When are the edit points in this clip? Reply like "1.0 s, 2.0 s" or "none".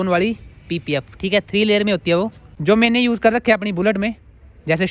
2.5 s